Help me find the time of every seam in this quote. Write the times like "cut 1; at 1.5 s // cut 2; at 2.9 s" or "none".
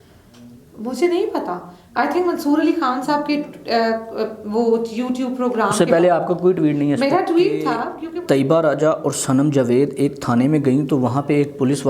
cut 1; at 7.9 s

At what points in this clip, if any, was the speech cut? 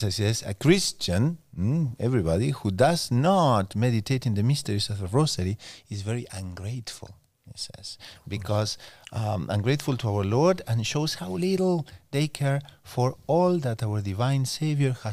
none

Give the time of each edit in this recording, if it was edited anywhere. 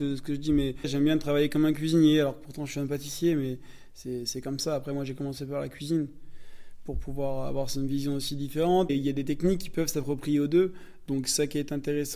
cut 1; at 0.9 s // cut 2; at 8.9 s

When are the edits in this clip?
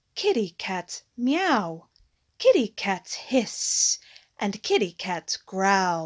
none

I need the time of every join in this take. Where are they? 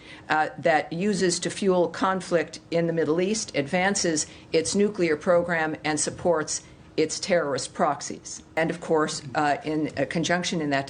cut 1; at 8.6 s

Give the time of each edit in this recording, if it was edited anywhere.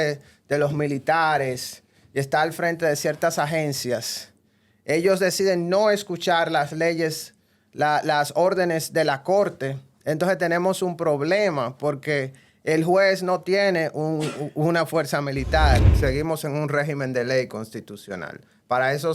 cut 1; at 15.9 s

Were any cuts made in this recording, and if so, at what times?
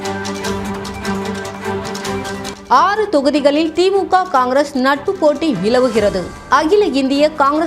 cut 1; at 2.5 s

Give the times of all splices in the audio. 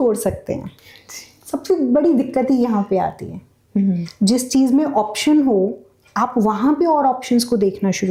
none

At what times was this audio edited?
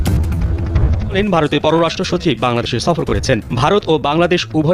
cut 1; at 1.1 s

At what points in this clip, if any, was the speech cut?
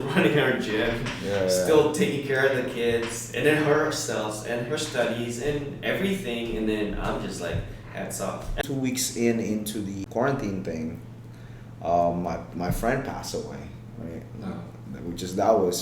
cut 1; at 8.6 s // cut 2; at 10.0 s

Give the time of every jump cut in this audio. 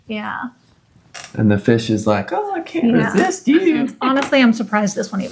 cut 1; at 3.9 s

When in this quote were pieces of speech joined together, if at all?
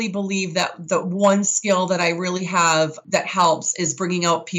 cut 1; at 3.0 s

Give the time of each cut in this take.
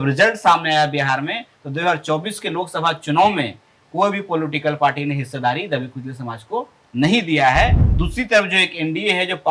cut 1; at 7.9 s

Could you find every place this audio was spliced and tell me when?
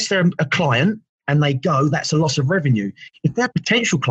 cut 1; at 1.1 s

